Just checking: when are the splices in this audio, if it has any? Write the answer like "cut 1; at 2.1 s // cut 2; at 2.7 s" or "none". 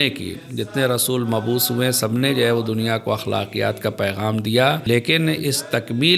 cut 1; at 4.8 s